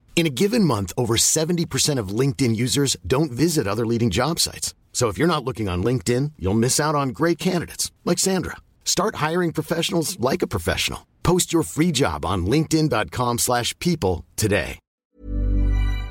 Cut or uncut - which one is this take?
cut